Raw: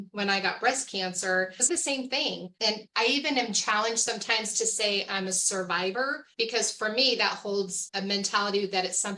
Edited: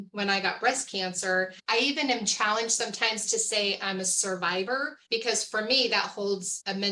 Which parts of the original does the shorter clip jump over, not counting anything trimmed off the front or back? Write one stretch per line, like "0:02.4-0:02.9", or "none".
0:01.6-0:02.8

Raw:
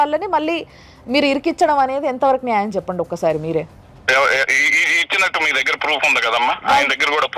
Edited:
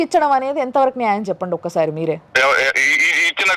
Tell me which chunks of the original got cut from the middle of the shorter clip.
0:03.7-0:04.0

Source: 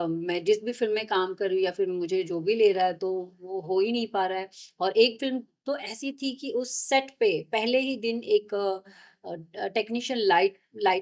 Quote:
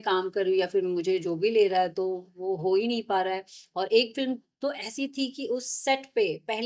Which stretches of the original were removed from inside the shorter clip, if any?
none

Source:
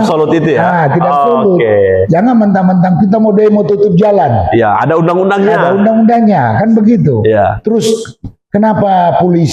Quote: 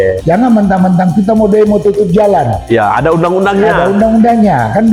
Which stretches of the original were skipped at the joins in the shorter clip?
none

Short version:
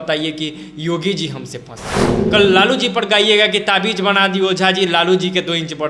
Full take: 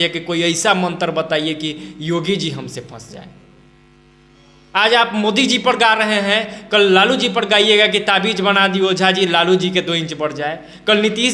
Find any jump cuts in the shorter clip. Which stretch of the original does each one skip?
0:03.4-0:06.6

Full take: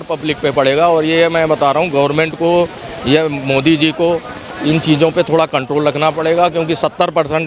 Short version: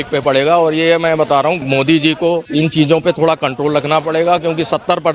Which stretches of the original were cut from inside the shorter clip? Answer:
0:01.9-0:03.4
0:04.2-0:04.6

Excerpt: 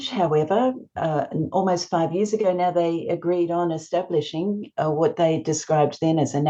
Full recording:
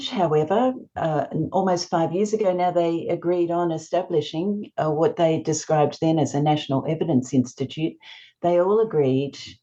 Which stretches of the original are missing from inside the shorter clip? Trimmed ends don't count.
none

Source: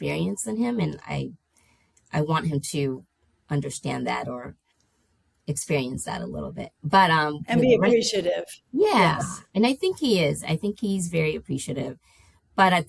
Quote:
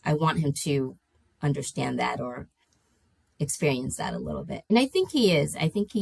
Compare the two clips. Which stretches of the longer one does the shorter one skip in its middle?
0:06.6-0:09.4

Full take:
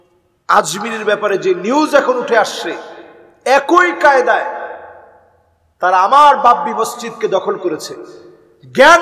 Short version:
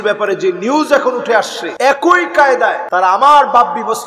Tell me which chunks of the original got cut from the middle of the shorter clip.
0:02.6-0:03.3
0:04.5-0:05.7

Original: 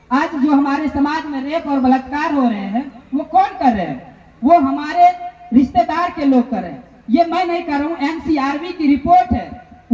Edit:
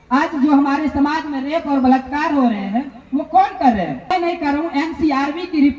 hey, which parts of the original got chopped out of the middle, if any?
0:04.1-0:07.3

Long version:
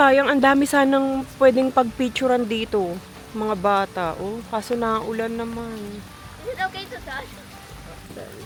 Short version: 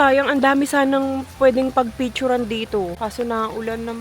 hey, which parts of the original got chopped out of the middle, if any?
0:02.9-0:04.5

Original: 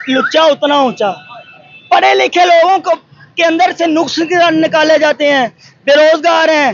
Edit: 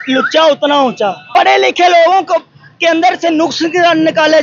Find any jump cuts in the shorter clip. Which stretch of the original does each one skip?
0:01.2-0:01.8

